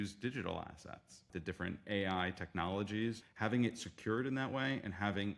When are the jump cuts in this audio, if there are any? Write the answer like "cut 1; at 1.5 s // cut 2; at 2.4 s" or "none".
cut 1; at 1.3 s // cut 2; at 3.3 s